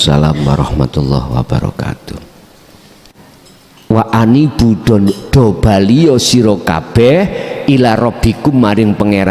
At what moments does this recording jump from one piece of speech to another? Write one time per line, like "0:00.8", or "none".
0:03.1